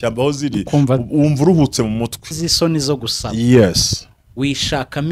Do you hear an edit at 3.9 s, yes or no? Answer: no